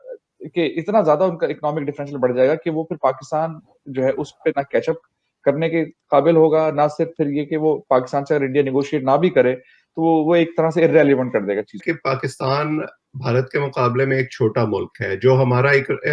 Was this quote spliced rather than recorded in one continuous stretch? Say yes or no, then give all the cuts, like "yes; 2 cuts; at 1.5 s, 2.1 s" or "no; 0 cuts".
yes; 1 cut; at 11.8 s